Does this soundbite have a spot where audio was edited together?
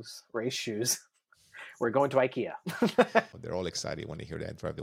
yes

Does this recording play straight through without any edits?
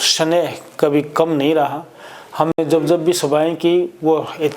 yes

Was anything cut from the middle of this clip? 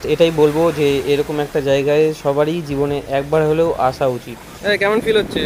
no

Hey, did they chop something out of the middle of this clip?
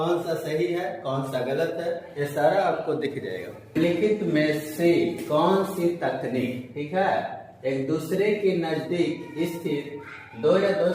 yes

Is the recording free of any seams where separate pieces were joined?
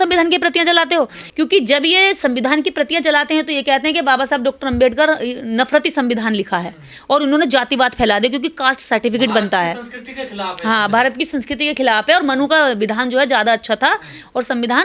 no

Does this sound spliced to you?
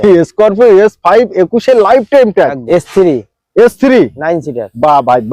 yes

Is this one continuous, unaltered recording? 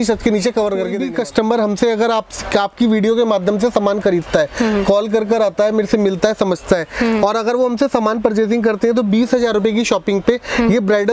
no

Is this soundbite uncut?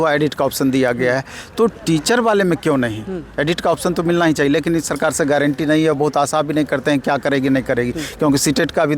yes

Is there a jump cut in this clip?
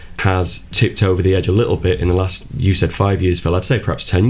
no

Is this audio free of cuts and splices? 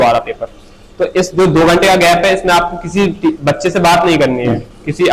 yes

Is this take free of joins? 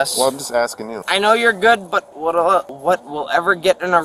no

